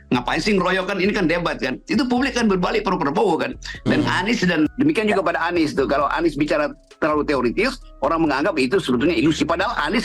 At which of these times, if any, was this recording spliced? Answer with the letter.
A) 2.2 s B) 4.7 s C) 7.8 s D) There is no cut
B